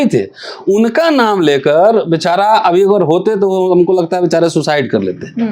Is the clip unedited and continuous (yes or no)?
yes